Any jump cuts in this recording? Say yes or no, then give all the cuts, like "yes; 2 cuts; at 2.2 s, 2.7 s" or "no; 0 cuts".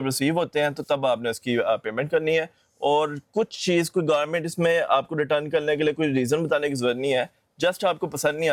no; 0 cuts